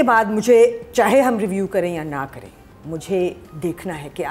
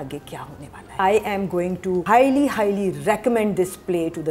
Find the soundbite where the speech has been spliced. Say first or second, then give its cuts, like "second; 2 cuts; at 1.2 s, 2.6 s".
second; 2 cuts; at 1.0 s, 2.0 s